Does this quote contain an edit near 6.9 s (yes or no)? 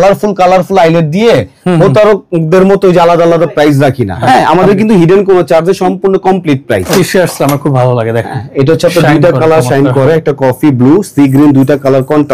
yes